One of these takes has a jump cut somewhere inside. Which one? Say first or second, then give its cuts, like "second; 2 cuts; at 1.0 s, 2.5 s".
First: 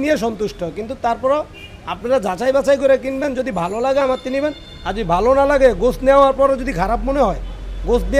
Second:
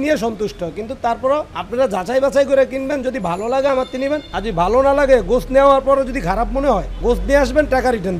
second; 3 cuts; at 1.6 s, 4.3 s, 6.9 s